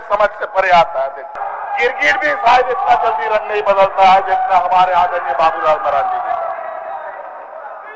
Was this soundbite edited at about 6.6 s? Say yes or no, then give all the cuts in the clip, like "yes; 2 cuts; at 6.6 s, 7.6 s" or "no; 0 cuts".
no; 1 cut; at 1.4 s